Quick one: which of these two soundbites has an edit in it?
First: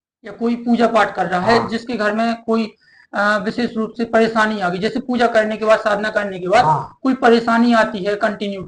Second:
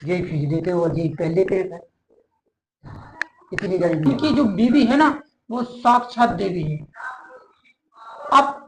second; 1 cut; at 4.1 s

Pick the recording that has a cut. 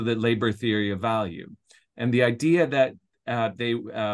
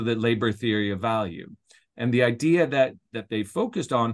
second; 1 cut; at 3.1 s

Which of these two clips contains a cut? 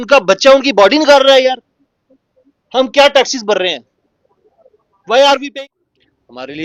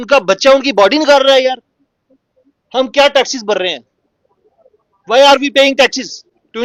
first; 1 cut; at 5.5 s

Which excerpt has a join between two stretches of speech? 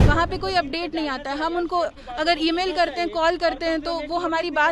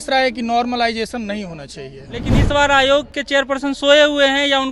second; 1 cut; at 2.3 s

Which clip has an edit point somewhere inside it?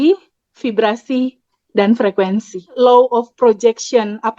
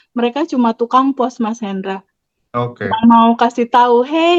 first; 1 cut; at 2.7 s

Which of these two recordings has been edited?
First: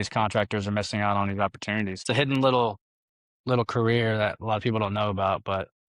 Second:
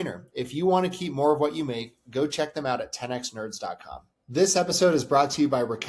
first; 1 cut; at 2.0 s

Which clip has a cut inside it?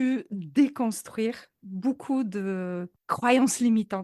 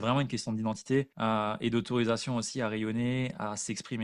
second; 1 cut; at 1.1 s

